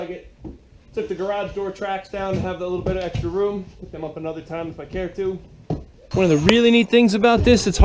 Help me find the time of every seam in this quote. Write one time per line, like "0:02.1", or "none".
0:06.0